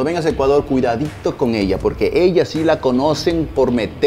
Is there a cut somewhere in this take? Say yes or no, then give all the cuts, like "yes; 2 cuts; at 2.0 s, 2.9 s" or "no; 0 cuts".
no; 0 cuts